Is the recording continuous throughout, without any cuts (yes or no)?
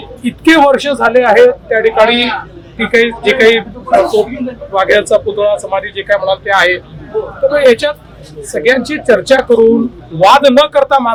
yes